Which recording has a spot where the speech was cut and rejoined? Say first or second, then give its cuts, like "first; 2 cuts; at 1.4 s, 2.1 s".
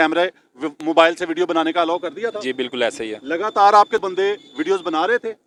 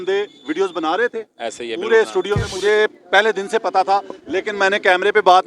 second; 1 cut; at 2.5 s